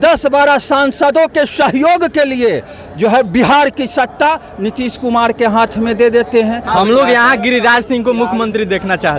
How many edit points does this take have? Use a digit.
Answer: 1